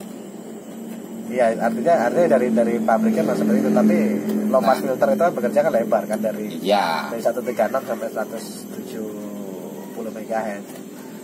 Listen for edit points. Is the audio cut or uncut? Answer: uncut